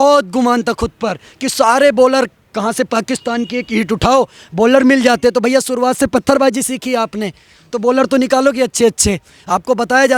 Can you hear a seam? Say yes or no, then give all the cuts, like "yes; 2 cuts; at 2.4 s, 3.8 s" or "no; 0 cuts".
no; 0 cuts